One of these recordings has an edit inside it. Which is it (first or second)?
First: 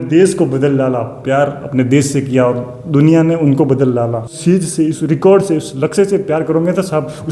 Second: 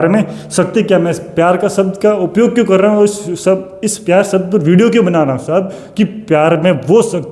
first